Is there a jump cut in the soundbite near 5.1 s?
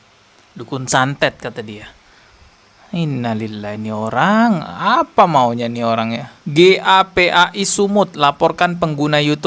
no; 1 cut; at 6.4 s

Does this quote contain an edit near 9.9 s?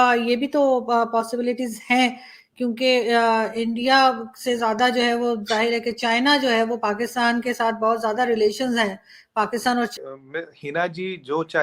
yes; 1 cut; at 9.9 s

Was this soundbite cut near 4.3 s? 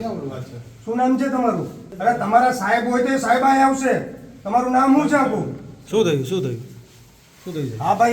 no; 1 cut; at 1.8 s

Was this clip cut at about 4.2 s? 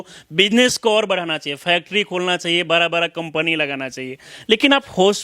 no; 0 cuts

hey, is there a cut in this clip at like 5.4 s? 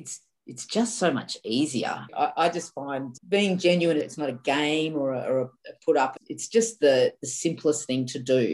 no; 3 cuts; at 2.1 s, 3.1 s, 4.1 s

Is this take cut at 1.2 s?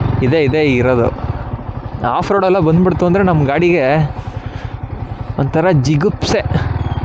no; 0 cuts

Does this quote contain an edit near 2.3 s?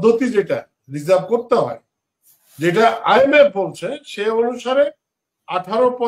no; 0 cuts

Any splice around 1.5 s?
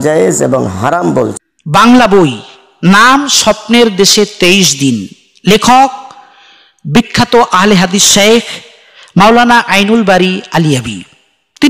yes; 1 cut; at 1.5 s

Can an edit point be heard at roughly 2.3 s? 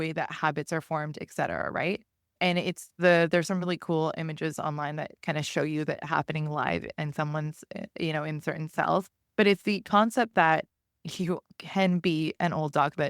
yes; 1 cut; at 2.3 s

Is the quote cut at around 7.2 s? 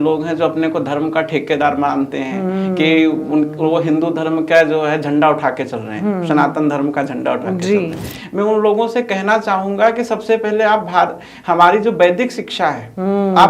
no; 0 cuts

